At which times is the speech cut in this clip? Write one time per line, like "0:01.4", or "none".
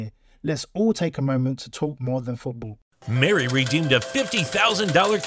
0:02.7